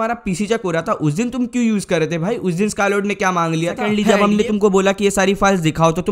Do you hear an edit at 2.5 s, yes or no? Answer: no